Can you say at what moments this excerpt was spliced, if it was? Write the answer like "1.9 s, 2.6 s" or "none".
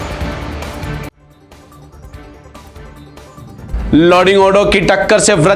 2.8 s